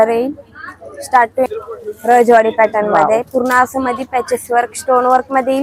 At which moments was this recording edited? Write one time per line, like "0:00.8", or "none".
0:01.5